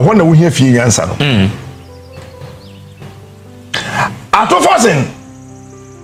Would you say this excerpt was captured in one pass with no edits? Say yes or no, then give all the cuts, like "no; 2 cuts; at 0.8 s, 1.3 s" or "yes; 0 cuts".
yes; 0 cuts